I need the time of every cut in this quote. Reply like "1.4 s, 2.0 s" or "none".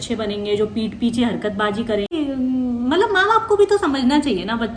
2.1 s